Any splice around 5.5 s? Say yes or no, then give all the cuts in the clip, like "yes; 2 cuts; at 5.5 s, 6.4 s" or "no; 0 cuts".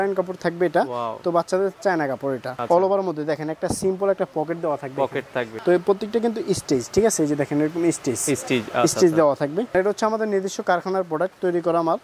yes; 3 cuts; at 2.5 s, 5.5 s, 9.7 s